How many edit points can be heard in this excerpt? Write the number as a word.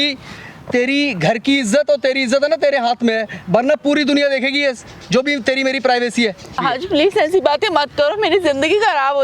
one